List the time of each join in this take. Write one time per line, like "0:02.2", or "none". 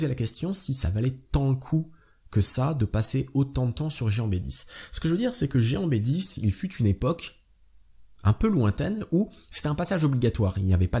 none